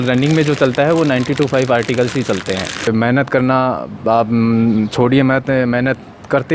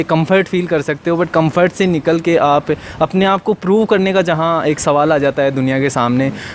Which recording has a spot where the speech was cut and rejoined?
first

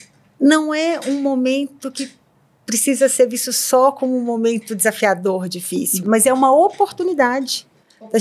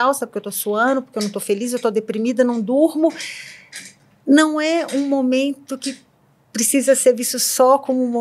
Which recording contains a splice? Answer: first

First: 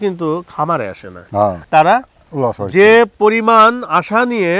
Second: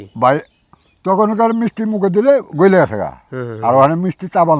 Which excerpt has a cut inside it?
first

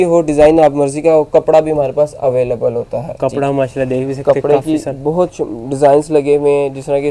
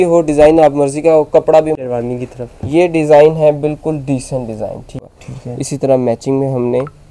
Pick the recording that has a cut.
second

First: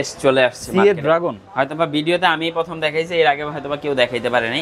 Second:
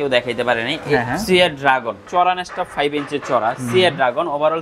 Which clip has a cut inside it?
second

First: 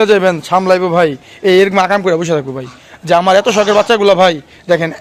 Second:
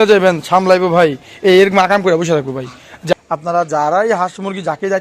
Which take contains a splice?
second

